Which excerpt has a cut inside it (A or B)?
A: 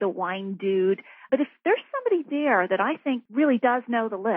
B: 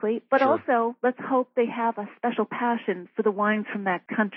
A